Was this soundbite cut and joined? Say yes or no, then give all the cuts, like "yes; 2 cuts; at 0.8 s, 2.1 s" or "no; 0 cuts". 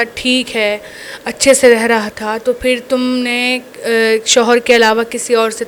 no; 0 cuts